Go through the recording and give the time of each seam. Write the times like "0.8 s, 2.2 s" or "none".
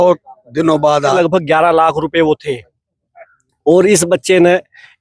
1.1 s